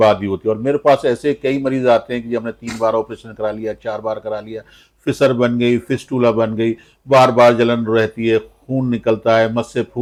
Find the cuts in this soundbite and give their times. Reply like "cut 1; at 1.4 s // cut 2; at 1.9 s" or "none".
none